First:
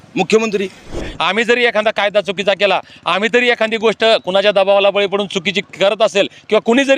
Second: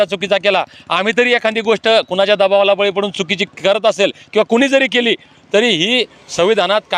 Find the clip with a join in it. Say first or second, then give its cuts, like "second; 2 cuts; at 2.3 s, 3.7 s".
first; 1 cut; at 1.1 s